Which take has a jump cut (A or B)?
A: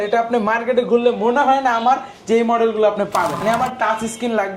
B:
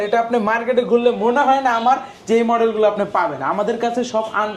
A